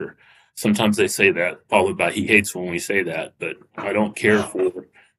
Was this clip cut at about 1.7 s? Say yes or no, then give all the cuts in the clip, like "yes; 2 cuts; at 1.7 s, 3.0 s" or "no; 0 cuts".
no; 1 cut; at 3.7 s